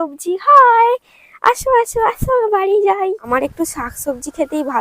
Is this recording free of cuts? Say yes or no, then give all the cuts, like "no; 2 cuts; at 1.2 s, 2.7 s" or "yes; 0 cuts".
no; 1 cut; at 3.2 s